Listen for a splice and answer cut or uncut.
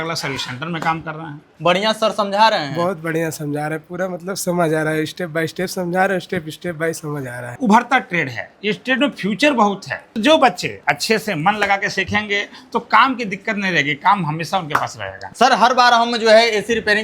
cut